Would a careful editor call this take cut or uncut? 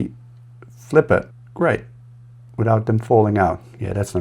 cut